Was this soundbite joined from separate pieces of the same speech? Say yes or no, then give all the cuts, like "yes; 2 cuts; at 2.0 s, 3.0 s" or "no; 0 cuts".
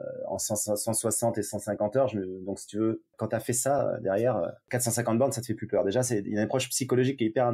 yes; 1 cut; at 3.1 s